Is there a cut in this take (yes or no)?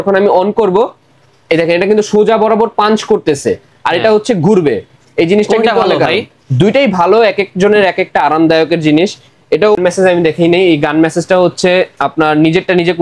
yes